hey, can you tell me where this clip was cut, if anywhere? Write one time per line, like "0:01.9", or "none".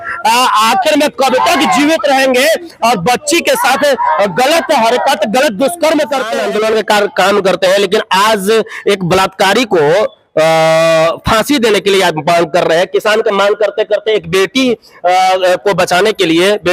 0:06.3